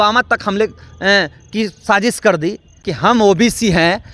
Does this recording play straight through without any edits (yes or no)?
no